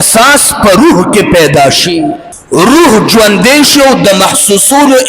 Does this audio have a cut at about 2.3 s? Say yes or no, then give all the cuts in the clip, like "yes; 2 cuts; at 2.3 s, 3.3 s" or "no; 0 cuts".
yes; 1 cut; at 2.3 s